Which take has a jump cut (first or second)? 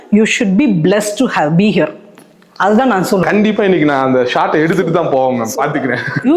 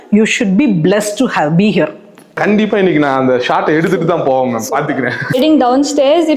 second